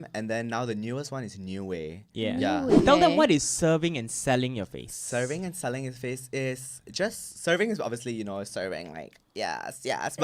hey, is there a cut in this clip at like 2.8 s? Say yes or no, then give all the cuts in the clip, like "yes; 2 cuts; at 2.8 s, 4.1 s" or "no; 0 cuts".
yes; 1 cut; at 2.8 s